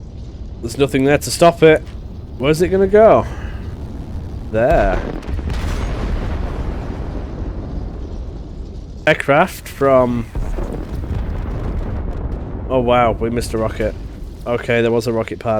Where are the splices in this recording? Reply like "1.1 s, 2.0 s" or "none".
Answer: 9.1 s